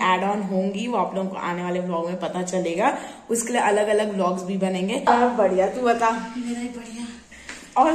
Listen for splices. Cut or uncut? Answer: cut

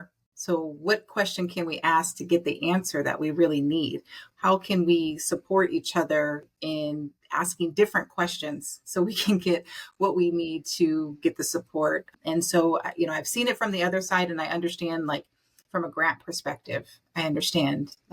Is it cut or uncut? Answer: cut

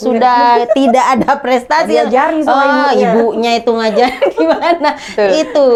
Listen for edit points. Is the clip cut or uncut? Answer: uncut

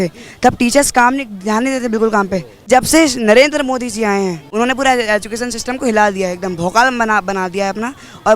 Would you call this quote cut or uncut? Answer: cut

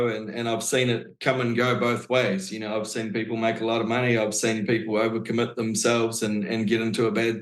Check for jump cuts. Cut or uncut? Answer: uncut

